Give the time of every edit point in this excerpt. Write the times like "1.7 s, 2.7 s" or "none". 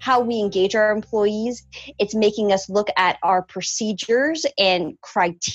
none

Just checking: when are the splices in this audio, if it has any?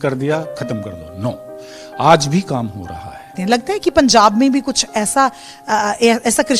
3.3 s

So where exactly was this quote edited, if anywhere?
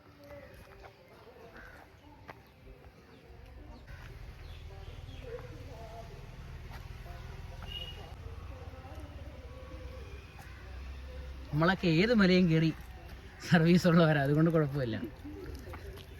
3.9 s, 8.1 s

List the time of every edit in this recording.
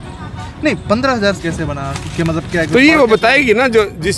1.4 s

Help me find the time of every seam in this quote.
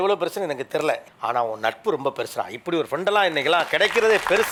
none

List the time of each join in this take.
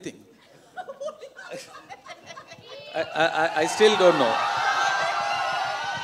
none

